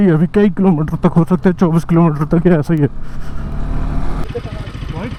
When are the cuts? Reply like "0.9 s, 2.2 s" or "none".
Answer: none